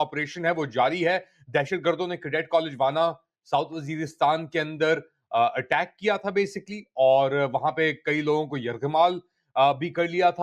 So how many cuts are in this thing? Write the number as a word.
zero